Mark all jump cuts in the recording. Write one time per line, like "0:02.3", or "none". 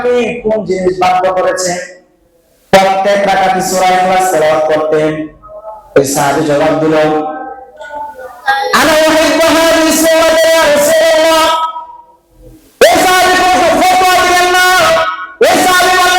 none